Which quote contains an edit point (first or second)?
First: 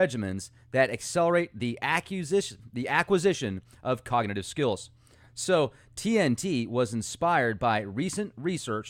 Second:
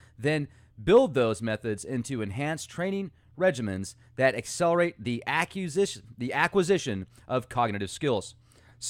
first